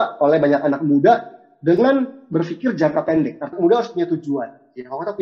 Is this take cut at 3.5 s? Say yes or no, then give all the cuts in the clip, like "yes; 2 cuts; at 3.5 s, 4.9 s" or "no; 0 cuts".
yes; 1 cut; at 3.5 s